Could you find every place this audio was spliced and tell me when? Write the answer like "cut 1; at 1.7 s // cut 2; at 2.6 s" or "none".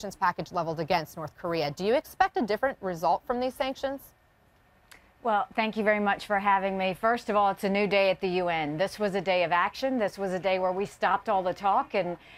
cut 1; at 10.3 s